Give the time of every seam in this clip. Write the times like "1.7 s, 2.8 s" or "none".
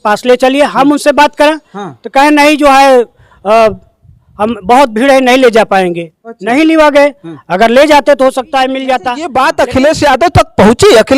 9.2 s